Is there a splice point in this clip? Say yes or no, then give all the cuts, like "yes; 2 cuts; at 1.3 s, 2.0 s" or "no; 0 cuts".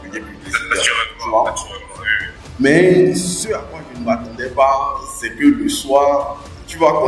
no; 0 cuts